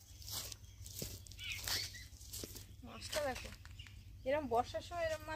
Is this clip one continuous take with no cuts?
yes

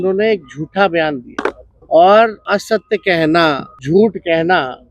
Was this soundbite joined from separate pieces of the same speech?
yes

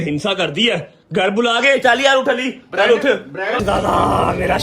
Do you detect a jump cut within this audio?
yes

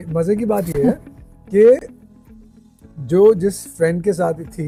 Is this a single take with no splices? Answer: yes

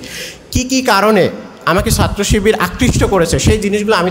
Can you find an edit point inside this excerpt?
no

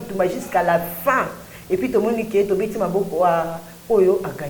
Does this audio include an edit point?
no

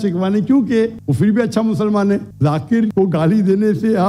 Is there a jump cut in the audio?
no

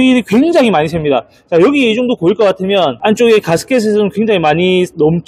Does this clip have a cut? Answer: no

